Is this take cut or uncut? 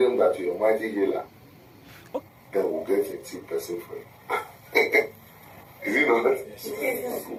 uncut